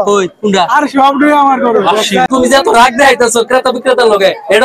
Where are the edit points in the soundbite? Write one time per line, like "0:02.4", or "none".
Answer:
0:02.3